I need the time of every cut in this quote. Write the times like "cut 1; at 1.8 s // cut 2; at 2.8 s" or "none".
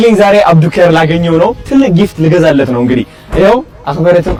none